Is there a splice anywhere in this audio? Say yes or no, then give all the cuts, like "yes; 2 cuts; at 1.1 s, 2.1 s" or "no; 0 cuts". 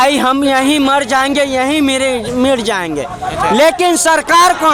no; 0 cuts